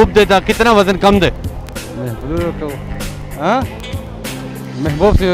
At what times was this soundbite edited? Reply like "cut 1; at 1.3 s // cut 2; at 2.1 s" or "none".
none